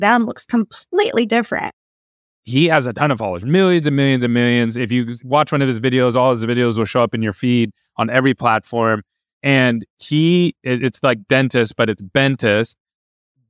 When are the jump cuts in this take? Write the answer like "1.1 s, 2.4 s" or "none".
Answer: 2.4 s